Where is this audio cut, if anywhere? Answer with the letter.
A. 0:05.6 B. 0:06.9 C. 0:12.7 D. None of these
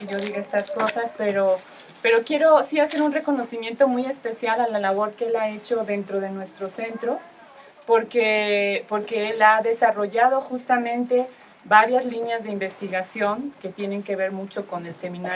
C